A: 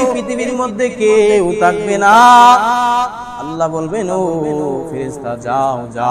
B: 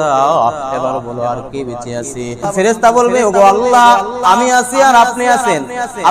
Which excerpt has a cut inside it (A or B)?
B